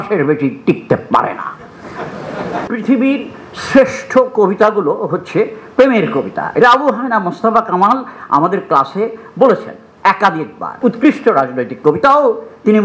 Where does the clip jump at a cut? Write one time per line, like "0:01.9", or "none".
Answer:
0:02.6
0:10.8

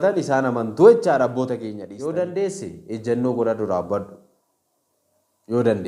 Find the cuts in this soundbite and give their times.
0:01.9

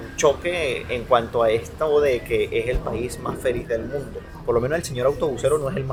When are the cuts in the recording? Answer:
none

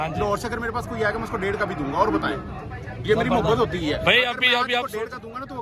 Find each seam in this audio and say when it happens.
none

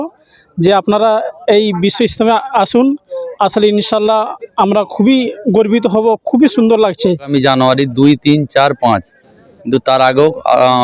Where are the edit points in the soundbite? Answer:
0:07.3

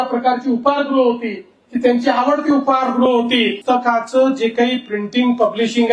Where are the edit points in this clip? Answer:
0:03.6

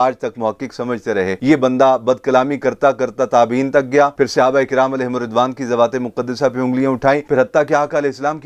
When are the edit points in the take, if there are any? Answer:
0:07.2

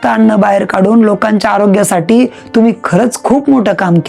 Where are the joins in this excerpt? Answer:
none

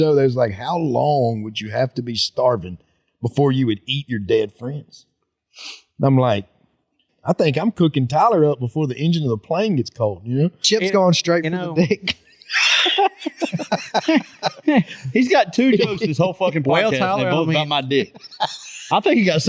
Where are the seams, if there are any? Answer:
0:07.0

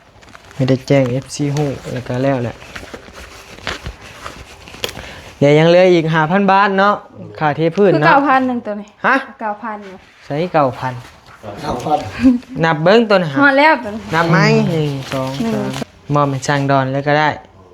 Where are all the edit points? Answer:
0:15.8

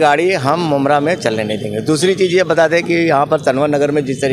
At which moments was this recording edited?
none

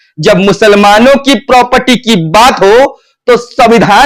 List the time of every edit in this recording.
none

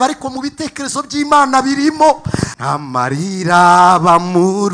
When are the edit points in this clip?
0:02.5

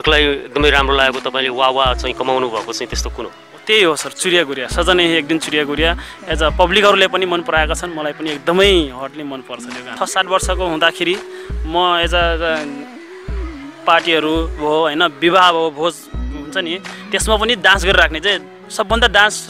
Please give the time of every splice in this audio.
0:09.9

